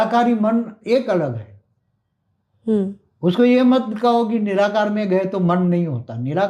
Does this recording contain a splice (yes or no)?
no